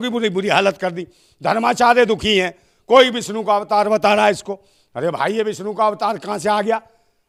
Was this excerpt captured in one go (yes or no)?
yes